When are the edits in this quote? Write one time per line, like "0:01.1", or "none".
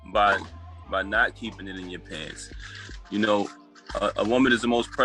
none